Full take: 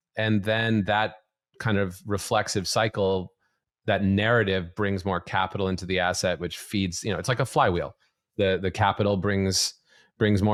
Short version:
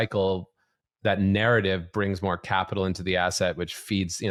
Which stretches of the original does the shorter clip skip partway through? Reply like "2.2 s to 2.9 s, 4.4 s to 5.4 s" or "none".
none